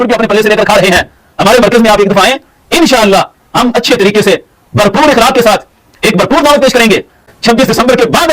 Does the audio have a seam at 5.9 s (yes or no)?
no